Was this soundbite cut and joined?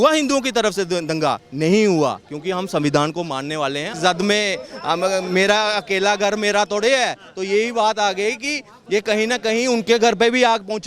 yes; 1 cut; at 3.9 s

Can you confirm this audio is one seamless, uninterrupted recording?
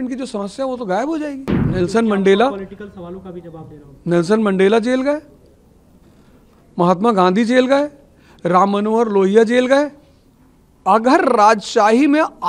no; 1 cut; at 1.5 s

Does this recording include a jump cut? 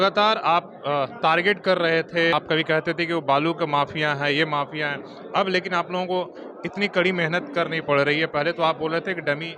yes; 1 cut; at 2.3 s

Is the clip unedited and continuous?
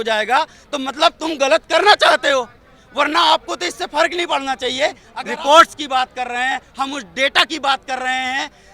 no; 1 cut; at 5.1 s

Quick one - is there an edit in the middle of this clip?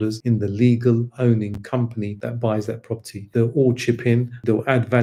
no; 0 cuts

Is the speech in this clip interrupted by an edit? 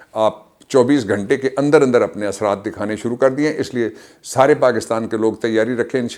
no; 0 cuts

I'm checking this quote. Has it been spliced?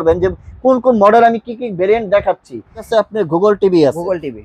yes; 1 cut; at 2.8 s

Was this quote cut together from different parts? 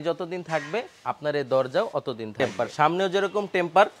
yes; 1 cut; at 2.4 s

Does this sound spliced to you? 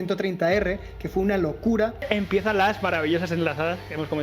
yes; 1 cut; at 2.0 s

